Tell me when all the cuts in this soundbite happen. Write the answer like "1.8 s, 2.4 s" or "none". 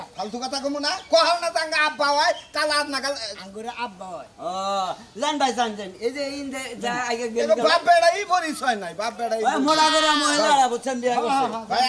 none